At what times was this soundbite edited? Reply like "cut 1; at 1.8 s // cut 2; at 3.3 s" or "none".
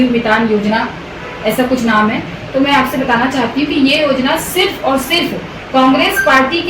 none